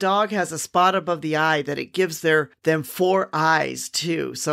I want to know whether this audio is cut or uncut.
uncut